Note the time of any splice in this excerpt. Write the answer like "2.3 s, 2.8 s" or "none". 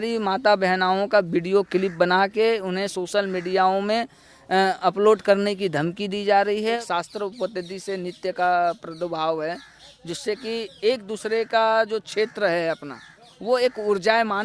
6.8 s